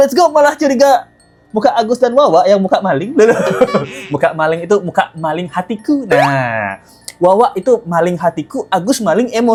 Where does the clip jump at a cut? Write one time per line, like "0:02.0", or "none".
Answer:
none